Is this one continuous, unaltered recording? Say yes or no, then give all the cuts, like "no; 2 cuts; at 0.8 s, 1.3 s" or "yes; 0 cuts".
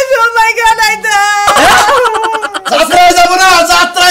no; 1 cut; at 2.6 s